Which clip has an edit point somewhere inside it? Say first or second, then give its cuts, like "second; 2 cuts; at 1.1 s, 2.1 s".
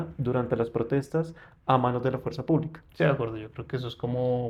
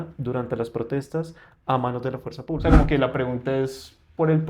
second; 1 cut; at 2.6 s